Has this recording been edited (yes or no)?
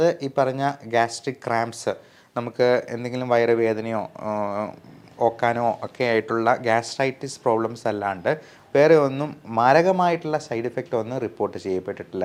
no